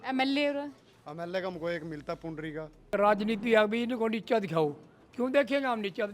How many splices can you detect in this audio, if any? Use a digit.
1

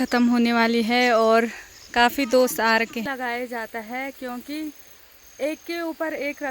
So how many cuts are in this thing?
1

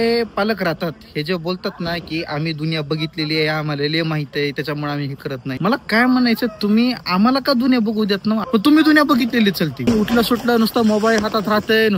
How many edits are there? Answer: 3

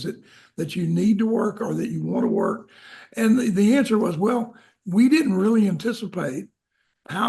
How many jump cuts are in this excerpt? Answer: 0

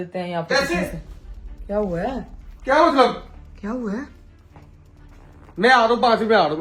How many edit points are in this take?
0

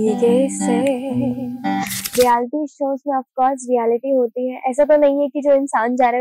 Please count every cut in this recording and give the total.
1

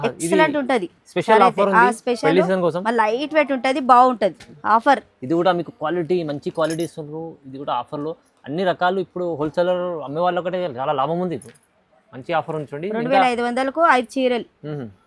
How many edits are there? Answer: 1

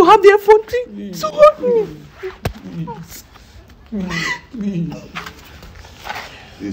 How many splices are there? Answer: 0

